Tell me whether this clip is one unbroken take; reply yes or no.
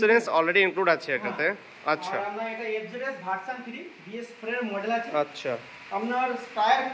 yes